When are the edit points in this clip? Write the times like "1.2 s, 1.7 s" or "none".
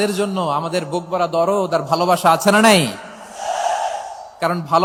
none